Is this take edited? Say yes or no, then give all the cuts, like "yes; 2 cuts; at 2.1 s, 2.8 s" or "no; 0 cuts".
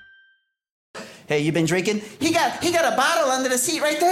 yes; 1 cut; at 1.0 s